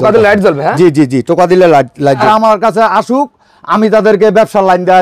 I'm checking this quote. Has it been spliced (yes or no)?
yes